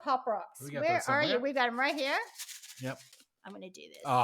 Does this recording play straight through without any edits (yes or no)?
no